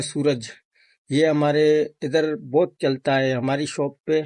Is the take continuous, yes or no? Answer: yes